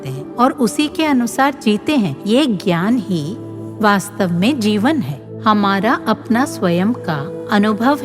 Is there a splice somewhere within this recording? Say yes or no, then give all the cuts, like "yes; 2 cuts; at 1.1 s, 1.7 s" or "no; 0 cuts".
yes; 1 cut; at 5.2 s